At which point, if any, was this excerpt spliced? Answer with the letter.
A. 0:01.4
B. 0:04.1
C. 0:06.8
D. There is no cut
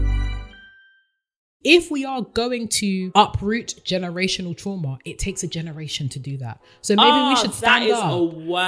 A